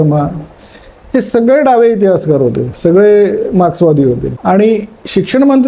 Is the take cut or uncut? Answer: cut